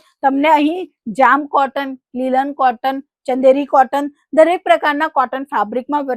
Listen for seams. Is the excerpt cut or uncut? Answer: uncut